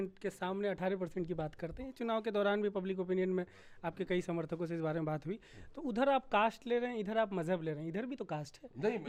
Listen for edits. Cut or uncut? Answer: uncut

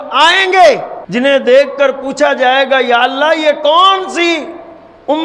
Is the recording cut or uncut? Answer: cut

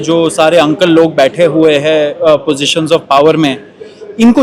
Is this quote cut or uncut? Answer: uncut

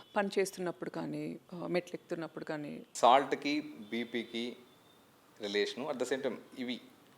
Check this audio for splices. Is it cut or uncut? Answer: cut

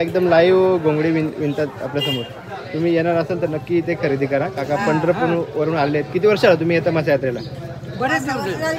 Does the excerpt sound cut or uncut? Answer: uncut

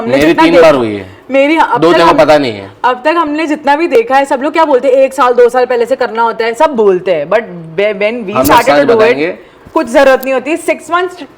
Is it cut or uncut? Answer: uncut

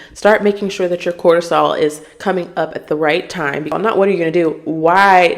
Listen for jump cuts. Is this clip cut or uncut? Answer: cut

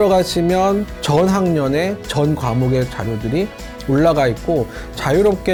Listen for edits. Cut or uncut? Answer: uncut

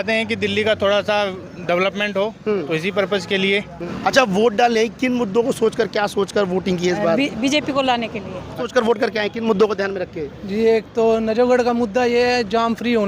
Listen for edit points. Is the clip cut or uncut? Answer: cut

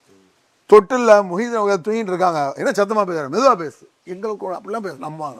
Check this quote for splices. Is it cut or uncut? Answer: uncut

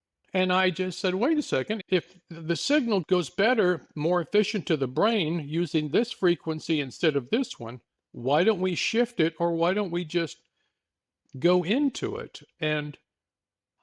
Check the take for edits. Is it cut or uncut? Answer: cut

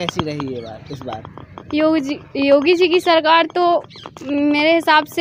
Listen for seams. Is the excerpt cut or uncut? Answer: uncut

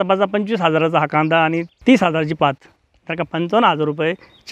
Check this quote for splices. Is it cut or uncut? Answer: cut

